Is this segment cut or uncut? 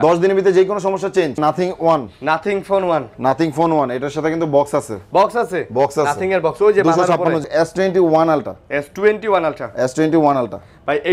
cut